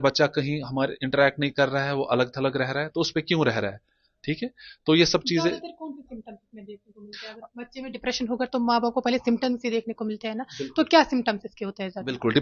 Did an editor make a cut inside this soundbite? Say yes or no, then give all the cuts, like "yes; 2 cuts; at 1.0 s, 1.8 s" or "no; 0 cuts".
no; 0 cuts